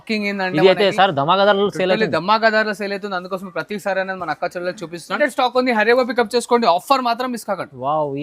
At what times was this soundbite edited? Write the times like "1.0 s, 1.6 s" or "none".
5.1 s